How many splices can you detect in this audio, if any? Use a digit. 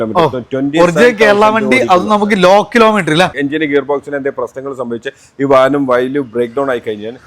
1